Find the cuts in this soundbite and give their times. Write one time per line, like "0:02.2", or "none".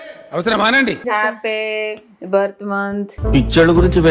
0:01.0